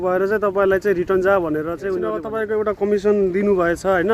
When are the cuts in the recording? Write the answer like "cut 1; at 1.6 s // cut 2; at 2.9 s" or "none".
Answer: cut 1; at 2.2 s